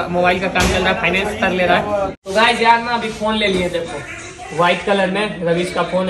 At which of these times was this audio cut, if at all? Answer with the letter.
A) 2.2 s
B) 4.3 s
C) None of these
A